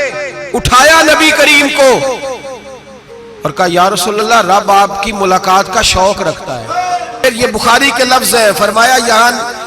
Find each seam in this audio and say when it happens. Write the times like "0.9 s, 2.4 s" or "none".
7.2 s